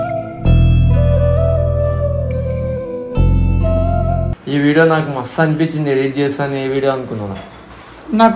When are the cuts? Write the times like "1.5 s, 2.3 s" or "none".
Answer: 4.3 s